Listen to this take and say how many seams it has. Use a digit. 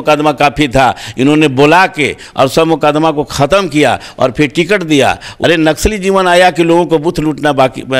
1